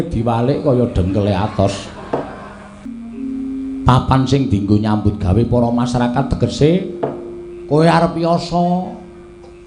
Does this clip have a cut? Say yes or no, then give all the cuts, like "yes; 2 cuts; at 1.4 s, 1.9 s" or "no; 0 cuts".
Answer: yes; 1 cut; at 2.9 s